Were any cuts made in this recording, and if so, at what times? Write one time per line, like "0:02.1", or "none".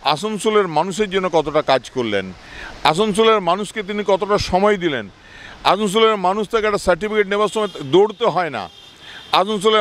none